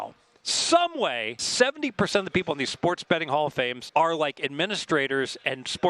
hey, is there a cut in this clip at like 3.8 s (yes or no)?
yes